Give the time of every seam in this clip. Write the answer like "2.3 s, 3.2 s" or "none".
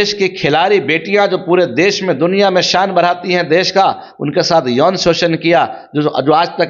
none

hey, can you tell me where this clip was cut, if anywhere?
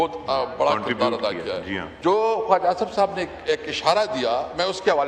1.9 s

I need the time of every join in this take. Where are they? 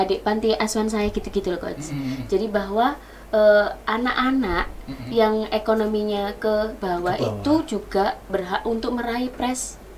none

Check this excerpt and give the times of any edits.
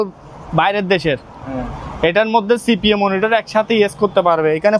none

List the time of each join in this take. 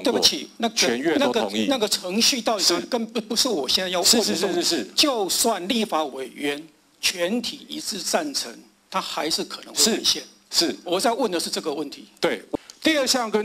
12.5 s

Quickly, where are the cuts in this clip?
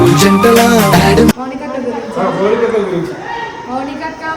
1.4 s

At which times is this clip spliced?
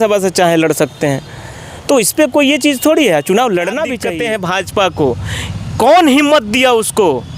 4.0 s

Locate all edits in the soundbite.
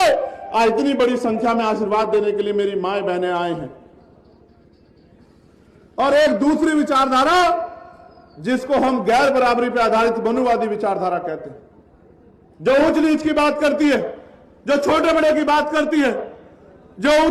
4.5 s

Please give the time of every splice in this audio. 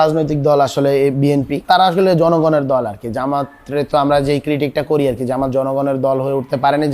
1.6 s

